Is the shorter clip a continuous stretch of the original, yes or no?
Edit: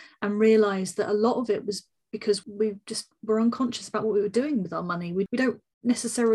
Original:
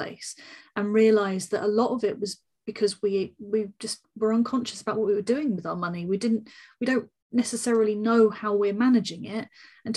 no